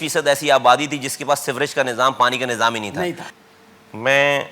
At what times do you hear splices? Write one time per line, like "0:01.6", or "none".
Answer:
0:03.3